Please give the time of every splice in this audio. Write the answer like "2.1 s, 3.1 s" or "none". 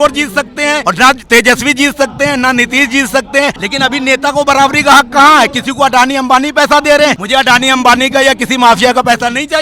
0.8 s, 3.6 s, 7.2 s